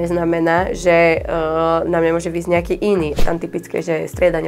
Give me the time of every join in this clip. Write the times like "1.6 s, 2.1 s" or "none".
3.2 s